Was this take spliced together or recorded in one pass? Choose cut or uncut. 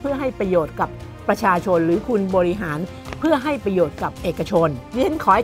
uncut